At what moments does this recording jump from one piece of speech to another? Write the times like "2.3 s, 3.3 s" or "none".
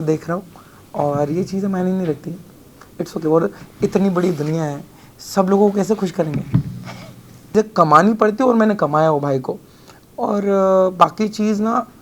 7.5 s